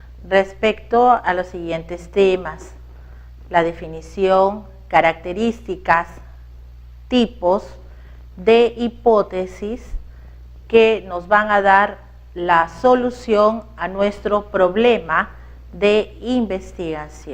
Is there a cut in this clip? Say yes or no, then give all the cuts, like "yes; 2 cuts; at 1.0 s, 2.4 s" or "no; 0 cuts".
yes; 1 cut; at 1.9 s